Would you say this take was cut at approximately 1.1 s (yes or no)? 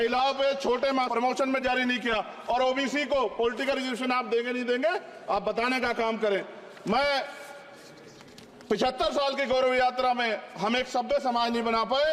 yes